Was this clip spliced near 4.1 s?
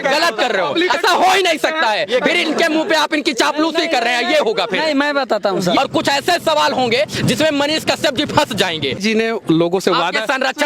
no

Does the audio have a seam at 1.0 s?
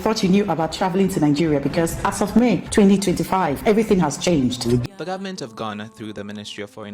no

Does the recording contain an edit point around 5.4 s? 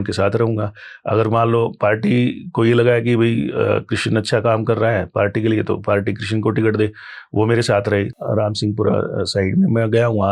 no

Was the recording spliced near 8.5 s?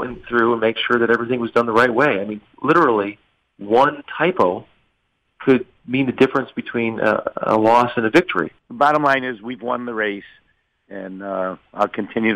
yes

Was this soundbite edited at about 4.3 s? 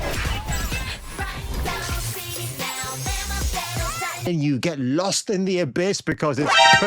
yes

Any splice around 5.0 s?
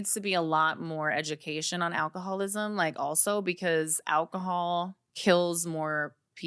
yes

